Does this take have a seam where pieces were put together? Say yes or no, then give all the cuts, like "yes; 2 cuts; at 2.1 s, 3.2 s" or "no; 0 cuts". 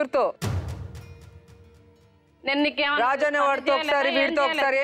no; 0 cuts